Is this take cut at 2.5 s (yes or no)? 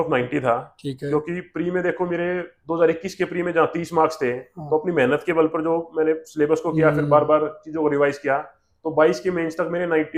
no